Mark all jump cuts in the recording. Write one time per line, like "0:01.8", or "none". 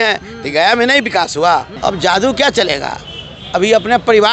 0:01.7